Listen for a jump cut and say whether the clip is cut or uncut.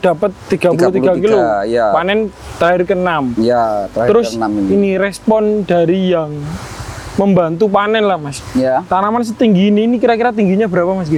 uncut